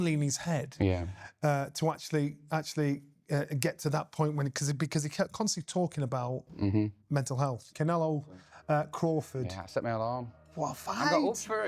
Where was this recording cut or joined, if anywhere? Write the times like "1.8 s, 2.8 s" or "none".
7.6 s